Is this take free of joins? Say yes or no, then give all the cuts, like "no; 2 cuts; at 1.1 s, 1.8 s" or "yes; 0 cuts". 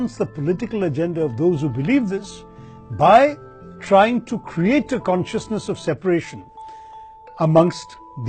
yes; 0 cuts